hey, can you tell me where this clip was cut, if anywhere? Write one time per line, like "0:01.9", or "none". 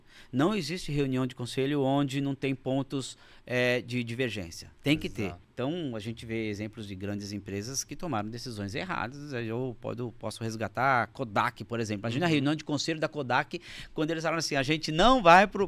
0:05.4